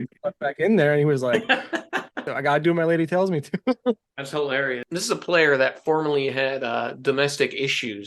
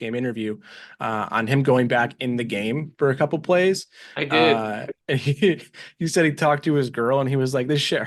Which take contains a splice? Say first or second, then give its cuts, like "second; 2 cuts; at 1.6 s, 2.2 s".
first; 2 cuts; at 2.3 s, 4.8 s